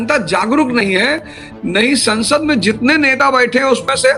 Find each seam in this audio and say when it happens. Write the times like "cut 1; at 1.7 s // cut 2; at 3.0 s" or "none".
none